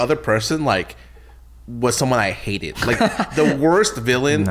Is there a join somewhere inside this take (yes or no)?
no